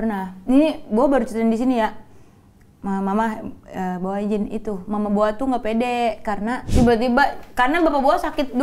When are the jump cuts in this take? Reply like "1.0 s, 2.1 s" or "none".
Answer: 6.6 s